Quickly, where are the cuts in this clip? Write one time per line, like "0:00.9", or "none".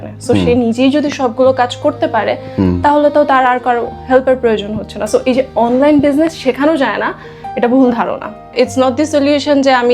0:08.5

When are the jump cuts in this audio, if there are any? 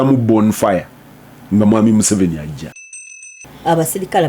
0:03.2

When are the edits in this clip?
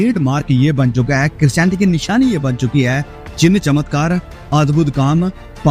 none

